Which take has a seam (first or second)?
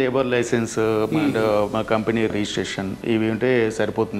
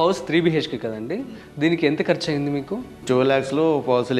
second